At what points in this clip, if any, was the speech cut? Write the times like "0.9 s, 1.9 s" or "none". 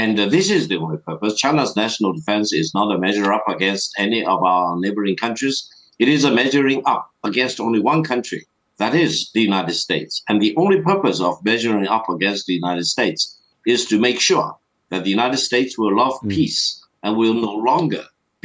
none